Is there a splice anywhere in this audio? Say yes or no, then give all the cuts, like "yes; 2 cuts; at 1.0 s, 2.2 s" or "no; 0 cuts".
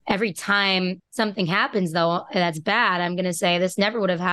yes; 1 cut; at 1.0 s